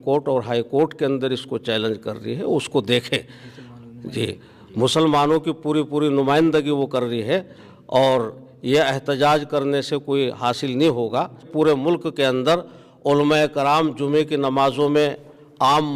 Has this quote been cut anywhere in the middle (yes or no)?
yes